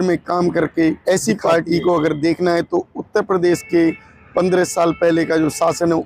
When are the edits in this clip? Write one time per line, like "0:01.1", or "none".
0:01.0